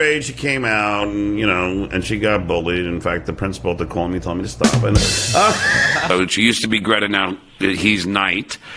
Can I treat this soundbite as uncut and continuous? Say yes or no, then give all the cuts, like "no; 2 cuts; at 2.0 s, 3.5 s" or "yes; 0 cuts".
no; 1 cut; at 6.1 s